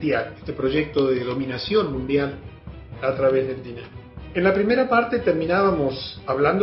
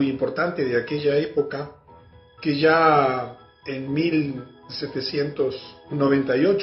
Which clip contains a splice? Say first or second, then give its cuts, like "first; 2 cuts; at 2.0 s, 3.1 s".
second; 1 cut; at 4.2 s